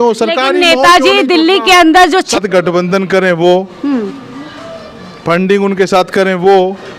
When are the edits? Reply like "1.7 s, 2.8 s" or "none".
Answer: 2.4 s